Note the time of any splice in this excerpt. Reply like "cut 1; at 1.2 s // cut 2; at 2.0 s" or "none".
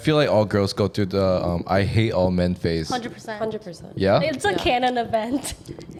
none